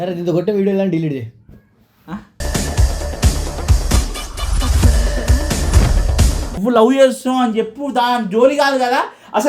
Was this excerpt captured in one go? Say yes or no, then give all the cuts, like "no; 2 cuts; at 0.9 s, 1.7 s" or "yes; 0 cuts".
no; 1 cut; at 6.5 s